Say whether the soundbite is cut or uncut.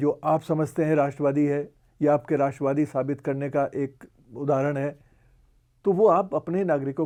uncut